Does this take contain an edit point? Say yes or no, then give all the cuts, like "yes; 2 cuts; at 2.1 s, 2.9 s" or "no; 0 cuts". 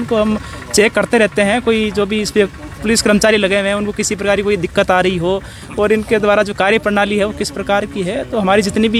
no; 0 cuts